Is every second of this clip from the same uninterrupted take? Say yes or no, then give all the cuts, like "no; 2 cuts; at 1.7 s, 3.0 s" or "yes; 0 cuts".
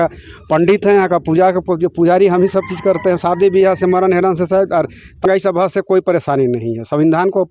no; 1 cut; at 5.2 s